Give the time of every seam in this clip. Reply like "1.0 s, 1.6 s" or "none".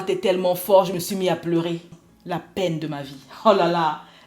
1.9 s